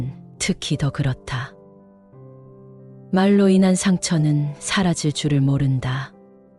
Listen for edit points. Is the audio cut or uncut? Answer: uncut